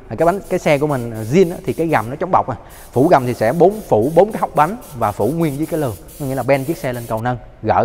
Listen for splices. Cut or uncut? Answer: uncut